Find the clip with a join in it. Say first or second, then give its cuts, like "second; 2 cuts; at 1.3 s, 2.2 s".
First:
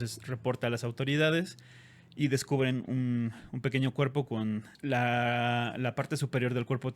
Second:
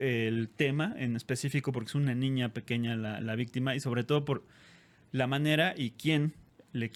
first; 1 cut; at 4.7 s